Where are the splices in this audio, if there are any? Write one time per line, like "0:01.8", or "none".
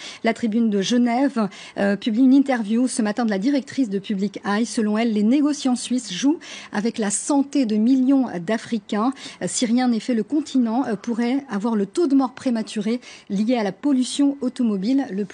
none